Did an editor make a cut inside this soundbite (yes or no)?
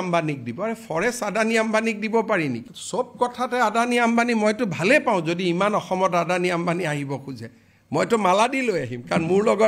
yes